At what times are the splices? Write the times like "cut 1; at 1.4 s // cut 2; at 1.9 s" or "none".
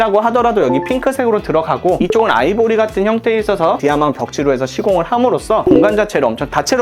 none